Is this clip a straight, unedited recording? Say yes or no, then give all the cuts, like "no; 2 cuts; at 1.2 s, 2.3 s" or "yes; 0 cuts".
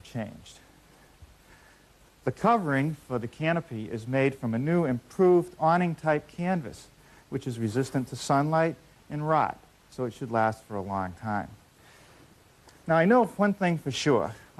yes; 0 cuts